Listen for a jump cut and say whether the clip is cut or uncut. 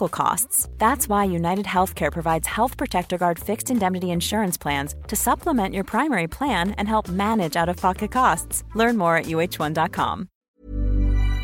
cut